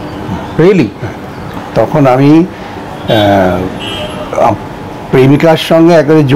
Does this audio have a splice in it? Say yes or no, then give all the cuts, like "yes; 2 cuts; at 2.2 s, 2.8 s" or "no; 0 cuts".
yes; 1 cut; at 1.6 s